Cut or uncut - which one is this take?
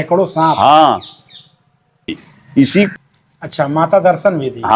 cut